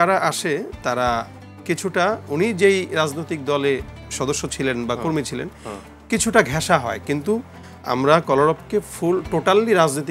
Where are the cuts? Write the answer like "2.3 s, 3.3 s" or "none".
none